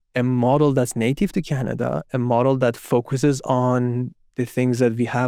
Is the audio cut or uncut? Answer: uncut